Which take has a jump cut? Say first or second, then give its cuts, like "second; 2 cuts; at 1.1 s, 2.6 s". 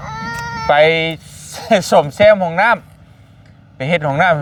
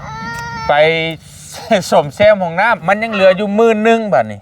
second; 1 cut; at 2.8 s